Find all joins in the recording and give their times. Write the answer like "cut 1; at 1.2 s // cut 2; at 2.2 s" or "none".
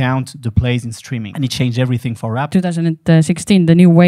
cut 1; at 1.3 s // cut 2; at 2.4 s